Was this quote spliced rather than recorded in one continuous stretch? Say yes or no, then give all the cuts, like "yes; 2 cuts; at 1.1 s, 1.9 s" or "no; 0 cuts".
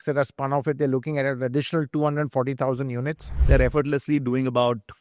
yes; 1 cut; at 3.3 s